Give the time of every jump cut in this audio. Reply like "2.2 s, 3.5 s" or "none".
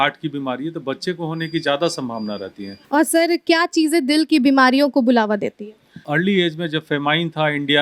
2.7 s, 6.1 s